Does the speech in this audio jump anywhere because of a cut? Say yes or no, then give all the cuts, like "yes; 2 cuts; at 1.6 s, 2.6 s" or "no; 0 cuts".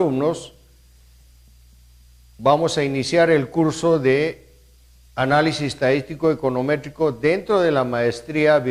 no; 0 cuts